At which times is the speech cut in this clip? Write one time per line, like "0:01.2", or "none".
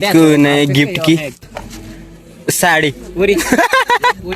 0:01.4